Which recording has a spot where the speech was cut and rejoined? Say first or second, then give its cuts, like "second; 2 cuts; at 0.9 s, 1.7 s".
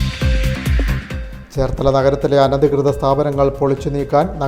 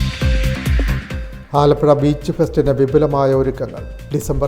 second; 1 cut; at 1.1 s